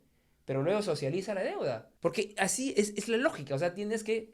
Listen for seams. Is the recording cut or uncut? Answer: cut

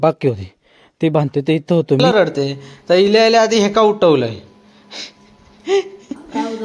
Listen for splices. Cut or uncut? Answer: cut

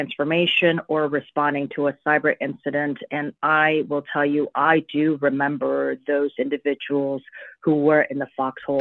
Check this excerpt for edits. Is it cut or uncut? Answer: uncut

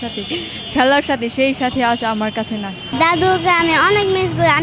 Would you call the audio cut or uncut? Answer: cut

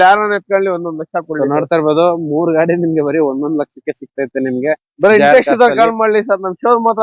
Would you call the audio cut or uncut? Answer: uncut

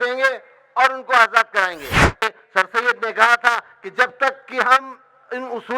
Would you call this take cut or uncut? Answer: cut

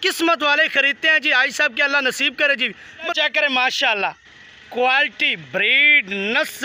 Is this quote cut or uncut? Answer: cut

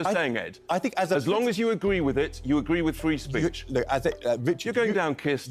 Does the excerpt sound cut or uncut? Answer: cut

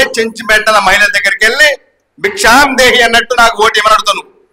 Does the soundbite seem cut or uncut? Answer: uncut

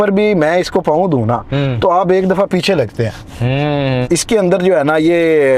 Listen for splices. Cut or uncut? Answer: cut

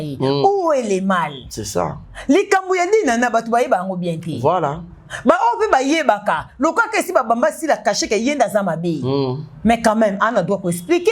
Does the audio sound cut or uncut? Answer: uncut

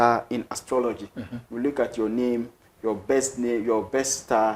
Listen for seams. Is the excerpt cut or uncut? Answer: uncut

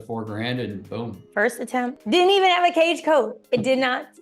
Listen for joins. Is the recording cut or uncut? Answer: cut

